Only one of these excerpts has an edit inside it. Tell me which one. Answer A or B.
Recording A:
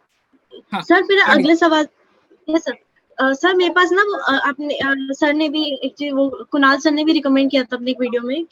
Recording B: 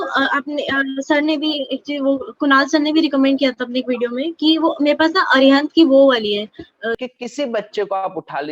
B